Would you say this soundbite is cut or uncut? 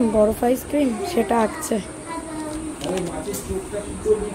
uncut